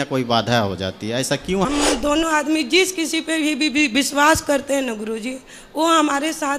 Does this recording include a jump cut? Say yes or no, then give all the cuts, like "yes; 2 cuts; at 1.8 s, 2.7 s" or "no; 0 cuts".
yes; 1 cut; at 1.7 s